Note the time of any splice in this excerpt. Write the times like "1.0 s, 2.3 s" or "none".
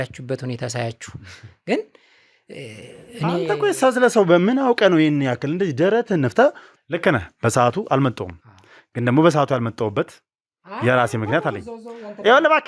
6.7 s